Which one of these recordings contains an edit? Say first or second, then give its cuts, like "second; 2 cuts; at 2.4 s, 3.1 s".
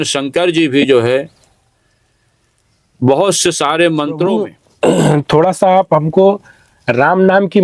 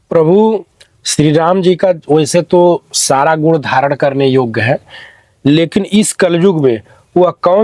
first; 1 cut; at 4.6 s